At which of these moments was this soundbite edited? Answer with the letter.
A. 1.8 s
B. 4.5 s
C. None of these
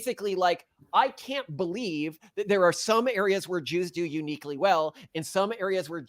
C